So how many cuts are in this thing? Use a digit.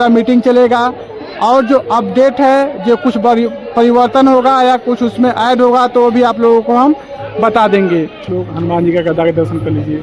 1